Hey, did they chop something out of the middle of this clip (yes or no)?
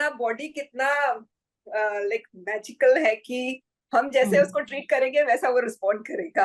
no